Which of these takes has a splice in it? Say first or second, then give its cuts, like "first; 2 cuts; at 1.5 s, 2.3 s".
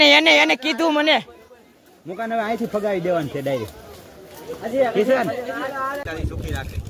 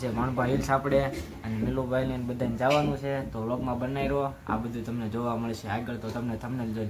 first; 1 cut; at 6.0 s